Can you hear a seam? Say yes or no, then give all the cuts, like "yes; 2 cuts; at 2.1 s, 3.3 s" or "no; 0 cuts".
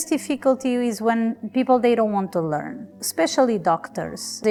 no; 0 cuts